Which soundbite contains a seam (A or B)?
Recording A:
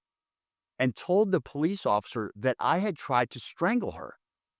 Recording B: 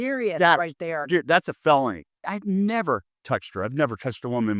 B